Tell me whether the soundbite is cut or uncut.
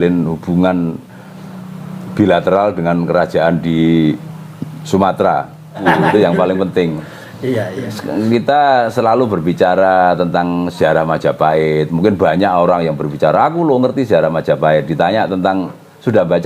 cut